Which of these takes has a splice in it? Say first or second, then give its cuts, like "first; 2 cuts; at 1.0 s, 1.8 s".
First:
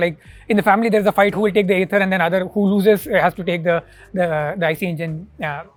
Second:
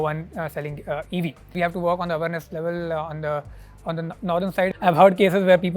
second; 2 cuts; at 1.5 s, 4.7 s